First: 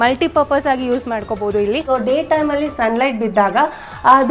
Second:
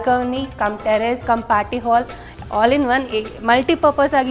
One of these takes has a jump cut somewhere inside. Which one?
first; 1 cut; at 1.8 s

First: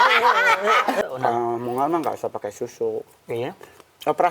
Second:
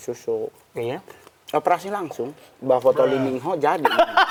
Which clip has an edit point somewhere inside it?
first; 1 cut; at 1.0 s

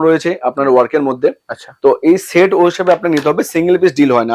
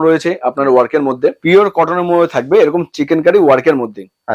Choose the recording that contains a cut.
second; 1 cut; at 1.4 s

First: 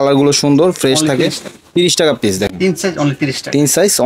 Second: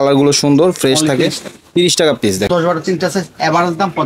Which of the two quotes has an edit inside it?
second; 1 cut; at 2.5 s

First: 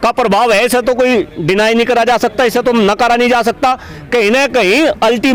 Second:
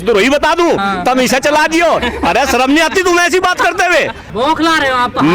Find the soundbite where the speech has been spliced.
second; 1 cut; at 4.2 s

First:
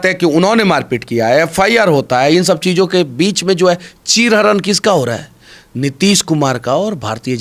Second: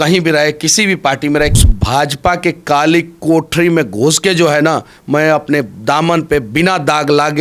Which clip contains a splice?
second; 1 cut; at 1.6 s

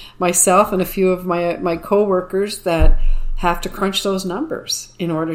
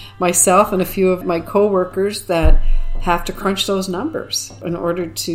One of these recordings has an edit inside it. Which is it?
second; 2 cuts; at 1.2 s, 4.6 s

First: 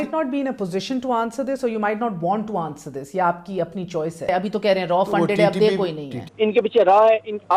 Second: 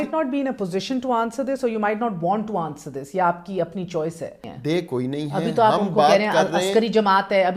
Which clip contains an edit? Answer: first; 2 cuts; at 4.3 s, 6.3 s

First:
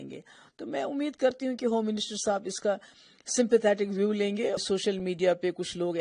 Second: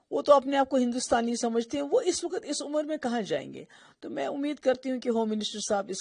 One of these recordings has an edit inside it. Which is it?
first; 1 cut; at 4.6 s

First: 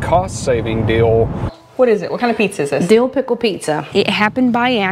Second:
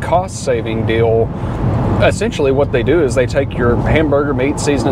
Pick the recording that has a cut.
first; 2 cuts; at 1.6 s, 3.8 s

